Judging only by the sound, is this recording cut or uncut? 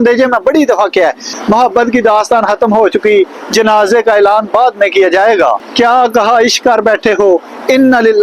cut